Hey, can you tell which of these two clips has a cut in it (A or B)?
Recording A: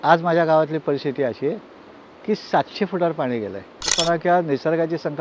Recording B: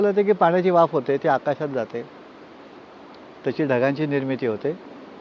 A